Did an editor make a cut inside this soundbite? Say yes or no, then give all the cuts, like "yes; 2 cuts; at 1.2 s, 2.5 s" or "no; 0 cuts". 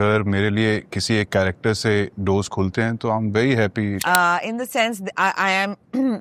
yes; 1 cut; at 4.0 s